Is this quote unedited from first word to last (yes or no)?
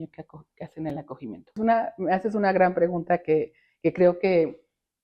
no